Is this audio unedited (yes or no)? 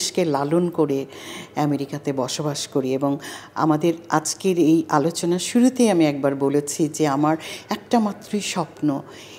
yes